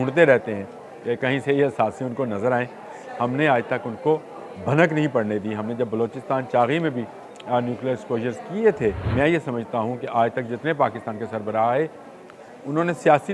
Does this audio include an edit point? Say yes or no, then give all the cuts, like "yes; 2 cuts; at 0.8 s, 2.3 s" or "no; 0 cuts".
yes; 1 cut; at 9.0 s